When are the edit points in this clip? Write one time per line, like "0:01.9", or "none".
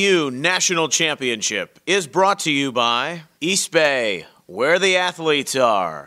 none